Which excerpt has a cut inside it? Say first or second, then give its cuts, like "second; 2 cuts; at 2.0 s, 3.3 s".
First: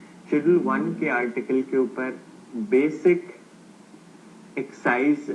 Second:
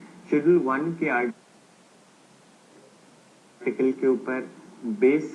first; 1 cut; at 1.3 s